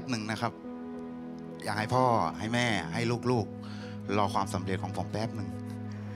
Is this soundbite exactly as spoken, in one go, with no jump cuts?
yes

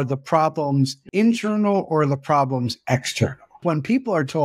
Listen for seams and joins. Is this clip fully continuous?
no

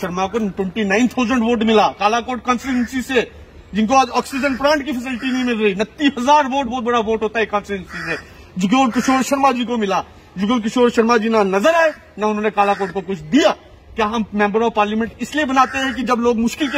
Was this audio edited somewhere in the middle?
no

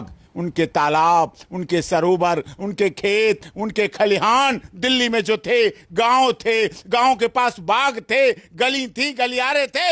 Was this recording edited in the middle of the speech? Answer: no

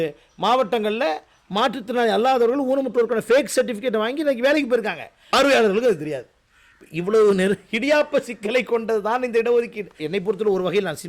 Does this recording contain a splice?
yes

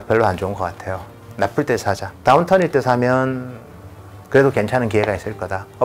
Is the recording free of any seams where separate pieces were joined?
no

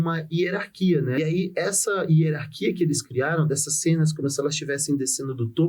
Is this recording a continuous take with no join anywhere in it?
no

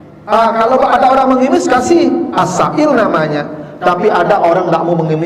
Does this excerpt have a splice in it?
no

